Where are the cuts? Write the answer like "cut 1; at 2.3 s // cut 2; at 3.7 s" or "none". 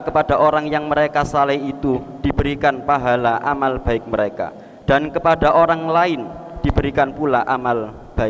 none